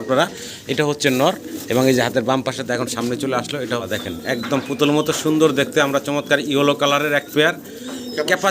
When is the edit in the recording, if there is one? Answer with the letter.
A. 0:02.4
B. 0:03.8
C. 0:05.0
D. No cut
B